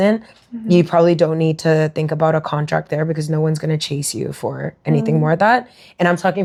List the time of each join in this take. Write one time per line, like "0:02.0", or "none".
none